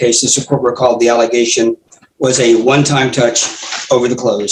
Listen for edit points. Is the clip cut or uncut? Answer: uncut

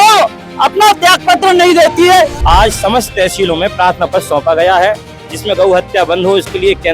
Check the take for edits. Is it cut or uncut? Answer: cut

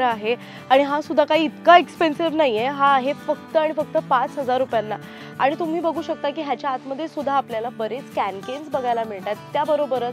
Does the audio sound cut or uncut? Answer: uncut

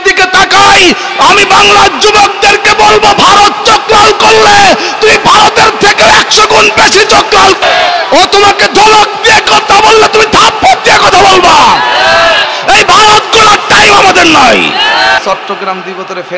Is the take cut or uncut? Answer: cut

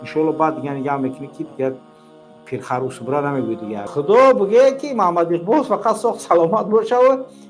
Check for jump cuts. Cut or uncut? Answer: cut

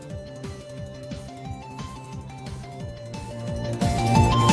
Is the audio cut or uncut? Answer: uncut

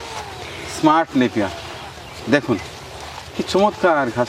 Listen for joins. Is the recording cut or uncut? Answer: uncut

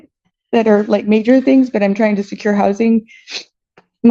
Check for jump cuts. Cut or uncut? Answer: uncut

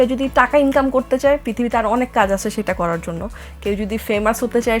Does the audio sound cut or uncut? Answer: uncut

